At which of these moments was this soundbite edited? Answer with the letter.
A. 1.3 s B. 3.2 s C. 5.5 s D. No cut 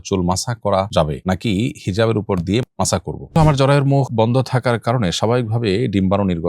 B